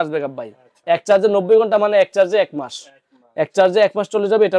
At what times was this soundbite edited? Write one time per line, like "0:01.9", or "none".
none